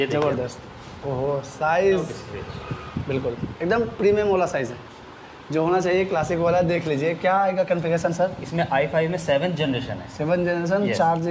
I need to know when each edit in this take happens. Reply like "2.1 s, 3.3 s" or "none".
none

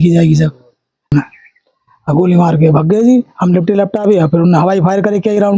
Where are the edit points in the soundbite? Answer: 1.1 s

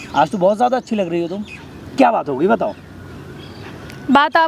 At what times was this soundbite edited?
none

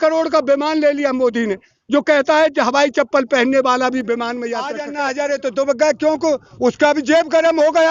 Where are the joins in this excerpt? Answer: 4.8 s

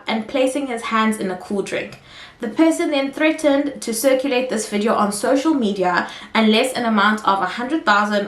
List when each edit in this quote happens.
none

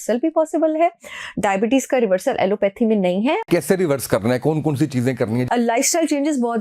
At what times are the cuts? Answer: 3.5 s, 5.4 s

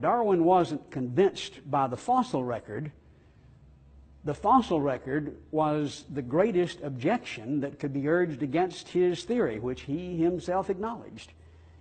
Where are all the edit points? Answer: 10.1 s

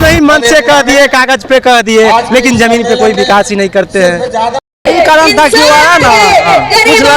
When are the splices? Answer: 4.7 s

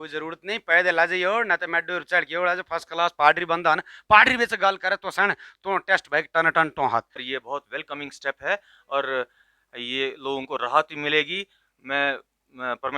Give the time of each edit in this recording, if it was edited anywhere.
7.2 s

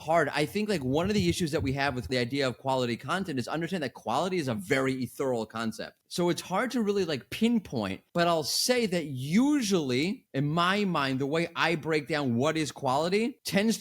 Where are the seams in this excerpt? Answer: 2.1 s, 5.9 s, 7.2 s

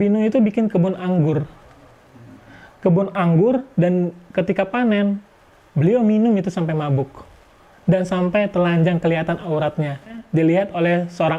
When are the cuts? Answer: 10.2 s

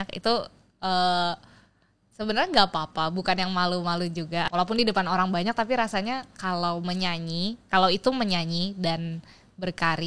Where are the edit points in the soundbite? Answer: 4.5 s

